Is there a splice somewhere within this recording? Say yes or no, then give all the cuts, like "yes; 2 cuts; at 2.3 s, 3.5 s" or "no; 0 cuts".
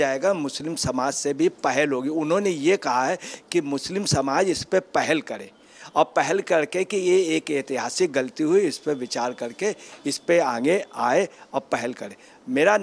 no; 0 cuts